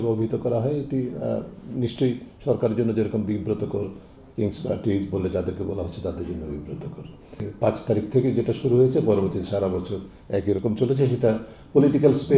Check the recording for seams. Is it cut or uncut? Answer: cut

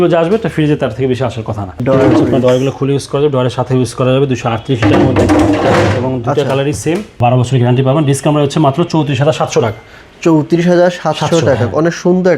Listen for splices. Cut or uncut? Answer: cut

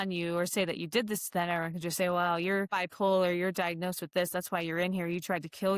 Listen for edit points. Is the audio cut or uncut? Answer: cut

